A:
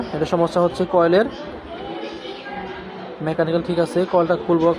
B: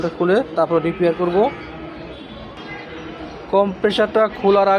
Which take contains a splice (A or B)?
B